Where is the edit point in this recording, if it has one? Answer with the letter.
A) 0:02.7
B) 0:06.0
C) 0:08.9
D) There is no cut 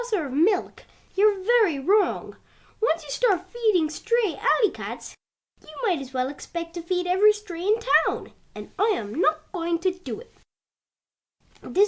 C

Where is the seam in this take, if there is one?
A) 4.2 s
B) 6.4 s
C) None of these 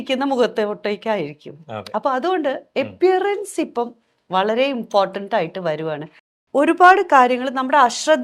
B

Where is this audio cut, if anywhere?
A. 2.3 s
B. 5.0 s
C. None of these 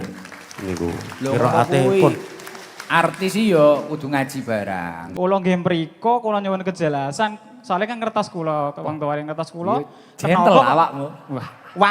B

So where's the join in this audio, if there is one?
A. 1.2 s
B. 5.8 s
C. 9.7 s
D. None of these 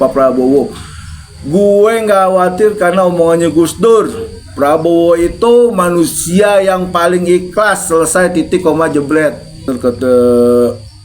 C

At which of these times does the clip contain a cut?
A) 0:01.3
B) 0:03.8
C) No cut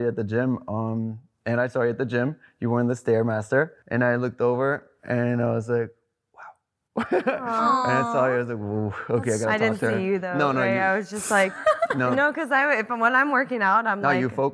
B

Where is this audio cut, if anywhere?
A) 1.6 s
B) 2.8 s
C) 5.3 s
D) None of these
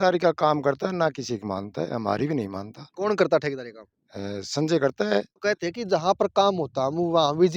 C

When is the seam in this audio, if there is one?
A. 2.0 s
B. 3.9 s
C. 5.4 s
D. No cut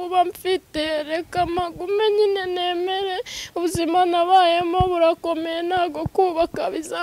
D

